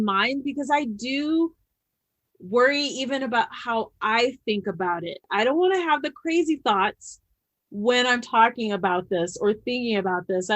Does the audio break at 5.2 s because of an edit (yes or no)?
yes